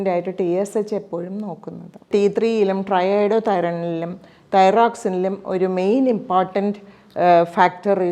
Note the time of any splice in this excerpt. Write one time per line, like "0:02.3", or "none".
0:02.1